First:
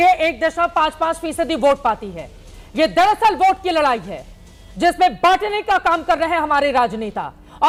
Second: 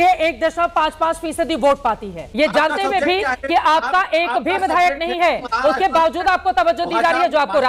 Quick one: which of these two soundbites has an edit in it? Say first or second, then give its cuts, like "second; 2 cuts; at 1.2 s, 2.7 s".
second; 1 cut; at 2.2 s